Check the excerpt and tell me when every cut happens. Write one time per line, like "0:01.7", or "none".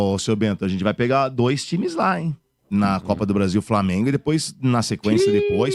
none